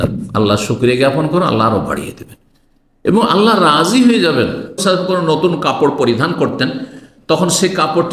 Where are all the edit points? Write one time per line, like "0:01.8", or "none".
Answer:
0:04.8